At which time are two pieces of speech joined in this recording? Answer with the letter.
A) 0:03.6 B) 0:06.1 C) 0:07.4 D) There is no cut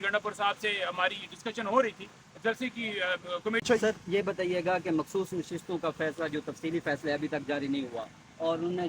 A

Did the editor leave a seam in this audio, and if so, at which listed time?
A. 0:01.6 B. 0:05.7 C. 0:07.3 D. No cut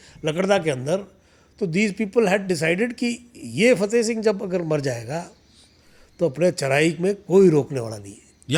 D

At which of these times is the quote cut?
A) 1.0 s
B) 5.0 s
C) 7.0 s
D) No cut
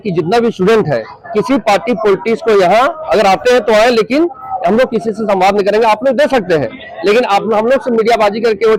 D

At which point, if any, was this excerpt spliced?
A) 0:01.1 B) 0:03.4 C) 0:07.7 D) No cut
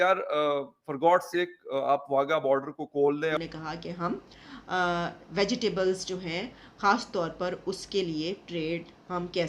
B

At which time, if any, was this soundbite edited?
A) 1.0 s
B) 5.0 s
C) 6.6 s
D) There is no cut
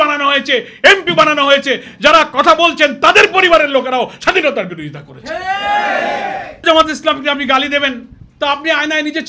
C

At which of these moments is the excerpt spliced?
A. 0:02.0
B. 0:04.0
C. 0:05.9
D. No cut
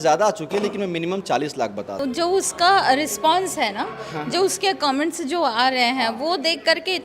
A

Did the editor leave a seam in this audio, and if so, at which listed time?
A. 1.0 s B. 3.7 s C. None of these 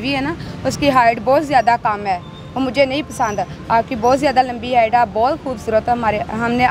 C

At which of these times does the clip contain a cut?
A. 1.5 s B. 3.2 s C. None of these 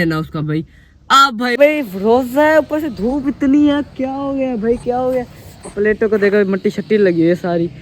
A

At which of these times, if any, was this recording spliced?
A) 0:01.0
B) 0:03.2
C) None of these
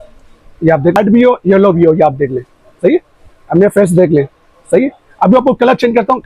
A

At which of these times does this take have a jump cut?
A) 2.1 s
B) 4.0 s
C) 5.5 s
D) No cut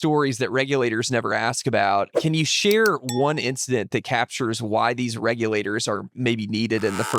A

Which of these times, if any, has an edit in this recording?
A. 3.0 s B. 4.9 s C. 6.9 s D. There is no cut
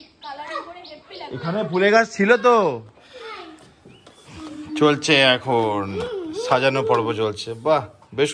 A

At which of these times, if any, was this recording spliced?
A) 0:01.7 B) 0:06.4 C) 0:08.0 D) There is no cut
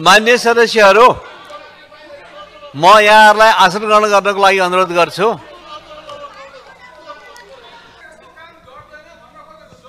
C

